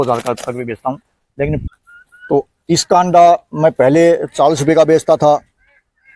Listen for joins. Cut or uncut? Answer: cut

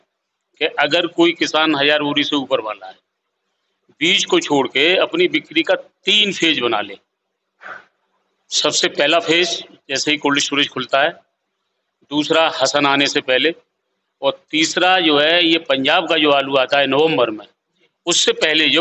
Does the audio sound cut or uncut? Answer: uncut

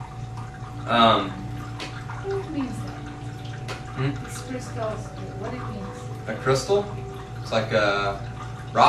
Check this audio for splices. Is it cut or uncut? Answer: cut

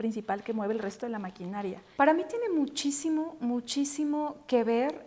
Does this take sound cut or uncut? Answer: cut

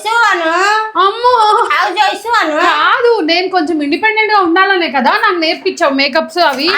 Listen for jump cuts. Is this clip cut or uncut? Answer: cut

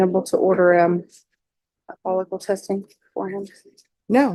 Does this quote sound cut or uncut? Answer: uncut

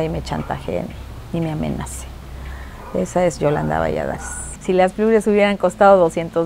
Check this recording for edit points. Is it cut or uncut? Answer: cut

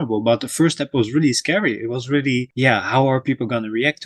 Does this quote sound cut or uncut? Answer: uncut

